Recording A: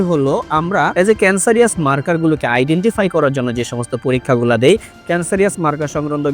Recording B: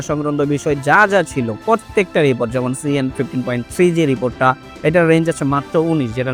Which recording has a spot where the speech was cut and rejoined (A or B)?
A